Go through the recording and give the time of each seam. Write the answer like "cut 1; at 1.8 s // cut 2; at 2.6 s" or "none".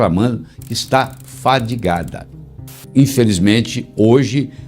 cut 1; at 2.3 s